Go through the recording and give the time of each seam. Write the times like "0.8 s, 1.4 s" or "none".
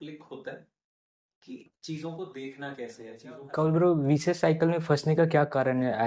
3.5 s